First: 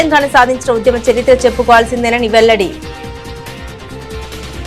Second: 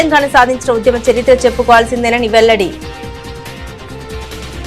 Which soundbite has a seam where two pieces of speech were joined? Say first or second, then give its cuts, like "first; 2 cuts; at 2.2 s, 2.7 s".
first; 1 cut; at 2.8 s